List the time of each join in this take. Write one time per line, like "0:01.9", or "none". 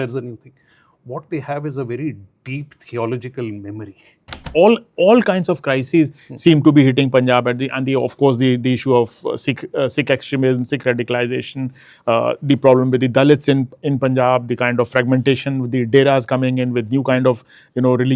0:04.5